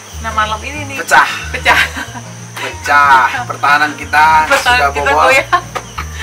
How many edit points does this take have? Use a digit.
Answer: 0